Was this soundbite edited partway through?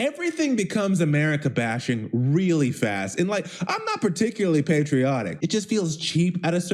yes; 1 cut; at 5.3 s

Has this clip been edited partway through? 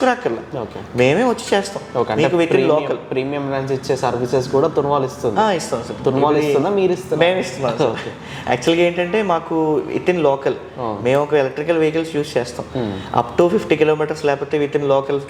no; 0 cuts

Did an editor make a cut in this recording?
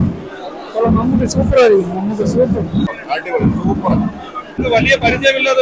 yes; 2 cuts; at 3.0 s, 4.6 s

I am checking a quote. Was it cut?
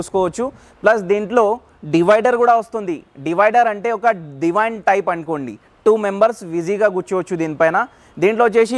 no; 0 cuts

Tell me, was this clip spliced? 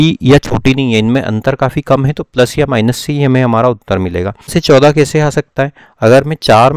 yes; 1 cut; at 4.5 s

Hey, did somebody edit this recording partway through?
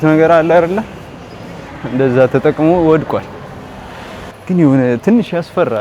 no; 0 cuts

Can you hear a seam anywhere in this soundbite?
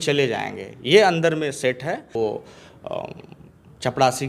yes; 1 cut; at 2.1 s

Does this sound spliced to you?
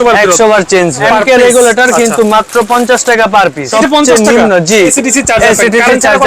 yes; 3 cuts; at 1.0 s, 3.7 s, 5.0 s

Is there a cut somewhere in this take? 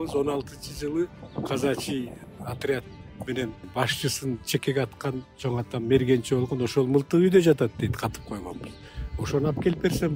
yes; 3 cuts; at 1.2 s, 2.2 s, 3.6 s

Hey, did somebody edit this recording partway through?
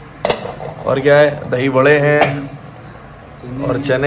no; 0 cuts

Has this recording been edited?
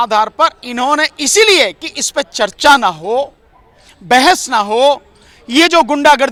no; 0 cuts

